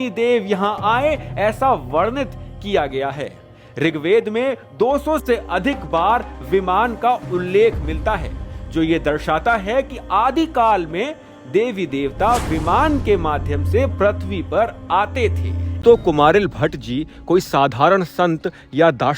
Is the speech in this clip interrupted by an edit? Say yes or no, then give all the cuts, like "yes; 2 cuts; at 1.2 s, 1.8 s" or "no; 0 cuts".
yes; 1 cut; at 15.8 s